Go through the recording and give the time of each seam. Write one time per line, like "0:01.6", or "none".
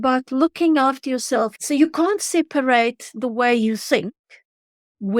0:01.6